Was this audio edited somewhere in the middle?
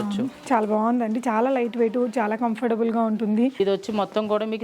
yes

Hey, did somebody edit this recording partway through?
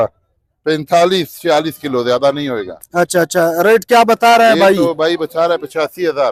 no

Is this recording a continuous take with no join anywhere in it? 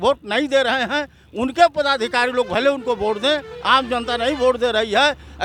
yes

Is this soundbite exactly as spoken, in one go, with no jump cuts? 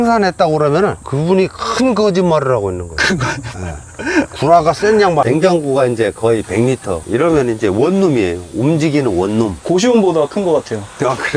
no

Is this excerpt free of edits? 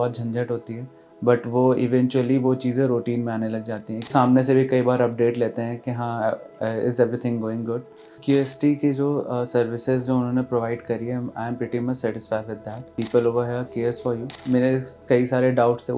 no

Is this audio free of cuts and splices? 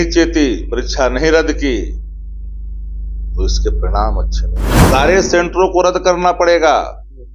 no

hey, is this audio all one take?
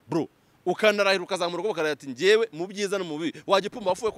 yes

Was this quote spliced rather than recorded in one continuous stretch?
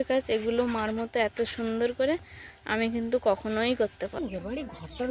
yes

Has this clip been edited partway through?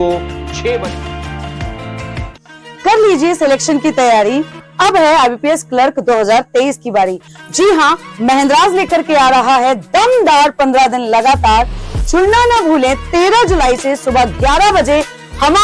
yes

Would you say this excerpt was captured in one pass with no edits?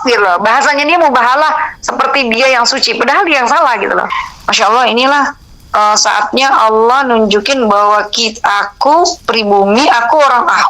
no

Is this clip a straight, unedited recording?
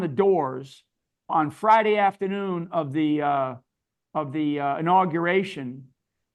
no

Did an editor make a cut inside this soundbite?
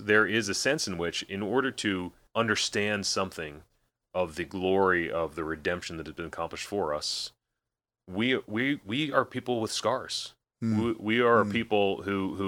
yes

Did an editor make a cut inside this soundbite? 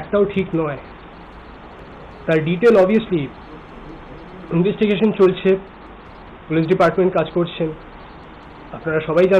yes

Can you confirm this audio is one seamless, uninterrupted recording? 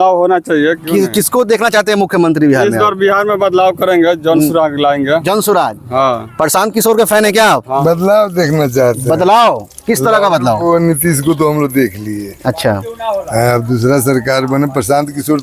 no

